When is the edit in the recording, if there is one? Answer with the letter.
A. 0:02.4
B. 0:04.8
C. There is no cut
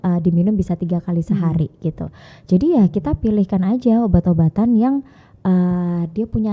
C